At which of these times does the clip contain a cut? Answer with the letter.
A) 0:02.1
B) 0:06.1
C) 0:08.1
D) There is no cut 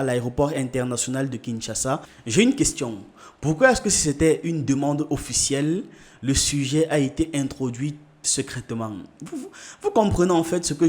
A